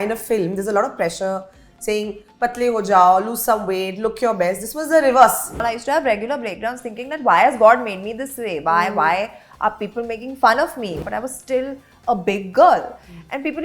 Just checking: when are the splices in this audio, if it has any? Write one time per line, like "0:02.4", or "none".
0:05.6
0:11.0